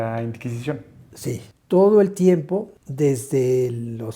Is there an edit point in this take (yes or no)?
yes